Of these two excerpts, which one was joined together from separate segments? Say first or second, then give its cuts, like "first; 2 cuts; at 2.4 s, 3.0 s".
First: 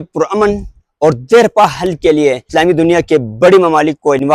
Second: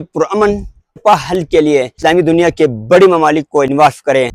second; 1 cut; at 1.0 s